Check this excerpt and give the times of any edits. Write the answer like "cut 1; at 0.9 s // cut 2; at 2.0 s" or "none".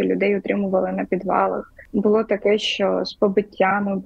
cut 1; at 1.7 s